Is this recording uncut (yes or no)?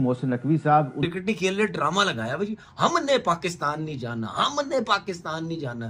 no